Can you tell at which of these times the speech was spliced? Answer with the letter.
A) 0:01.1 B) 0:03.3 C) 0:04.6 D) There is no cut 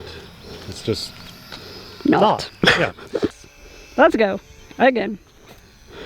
B